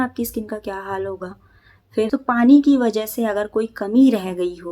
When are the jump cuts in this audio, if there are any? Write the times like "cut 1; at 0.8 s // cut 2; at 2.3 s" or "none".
cut 1; at 2.1 s